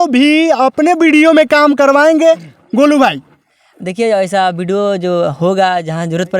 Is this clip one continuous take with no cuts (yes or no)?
yes